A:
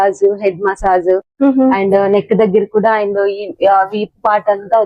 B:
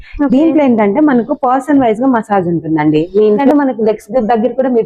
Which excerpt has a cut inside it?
B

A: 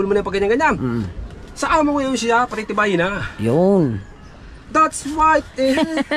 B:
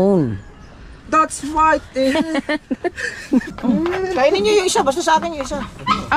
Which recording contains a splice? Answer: B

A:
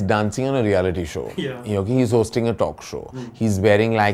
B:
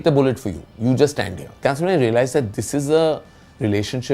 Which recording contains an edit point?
B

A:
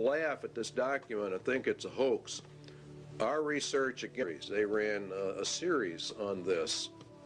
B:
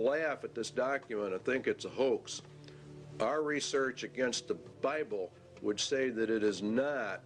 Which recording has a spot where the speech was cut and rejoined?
B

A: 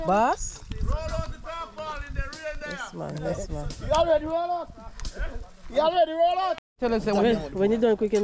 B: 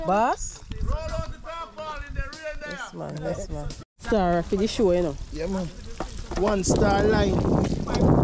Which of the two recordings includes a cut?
B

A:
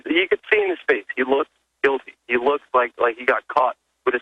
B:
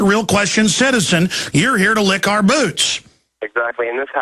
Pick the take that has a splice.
A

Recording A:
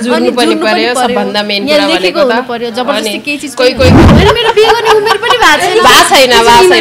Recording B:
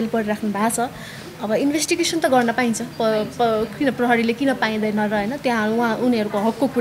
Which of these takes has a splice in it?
A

